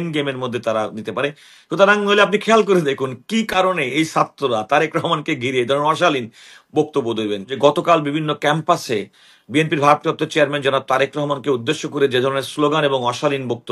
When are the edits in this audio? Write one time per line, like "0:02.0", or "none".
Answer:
0:07.5